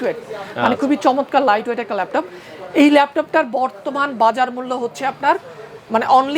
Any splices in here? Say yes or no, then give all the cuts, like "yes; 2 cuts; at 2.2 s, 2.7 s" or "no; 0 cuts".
no; 0 cuts